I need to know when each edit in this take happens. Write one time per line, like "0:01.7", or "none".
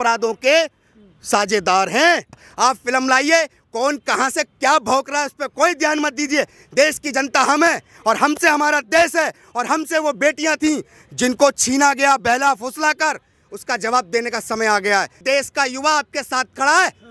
0:02.5
0:15.2